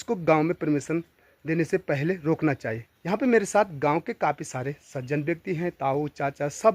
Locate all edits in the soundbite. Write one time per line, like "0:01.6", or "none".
0:02.9